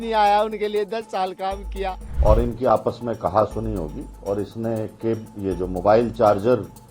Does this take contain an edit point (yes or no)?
yes